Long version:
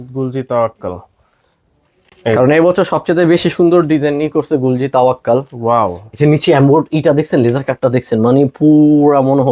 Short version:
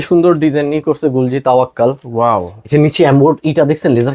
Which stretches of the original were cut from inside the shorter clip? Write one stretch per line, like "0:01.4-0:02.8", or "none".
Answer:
none